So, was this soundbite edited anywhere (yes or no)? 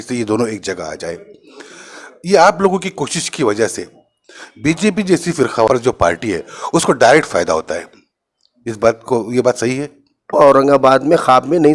yes